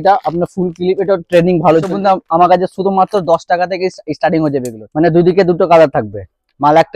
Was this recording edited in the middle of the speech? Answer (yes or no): yes